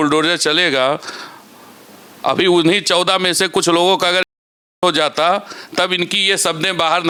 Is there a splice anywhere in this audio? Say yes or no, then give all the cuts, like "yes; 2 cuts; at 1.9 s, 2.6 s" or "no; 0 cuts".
no; 0 cuts